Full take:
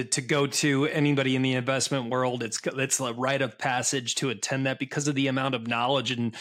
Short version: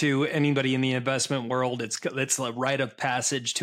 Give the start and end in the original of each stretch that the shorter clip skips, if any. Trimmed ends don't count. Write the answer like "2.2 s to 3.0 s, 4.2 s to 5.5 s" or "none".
none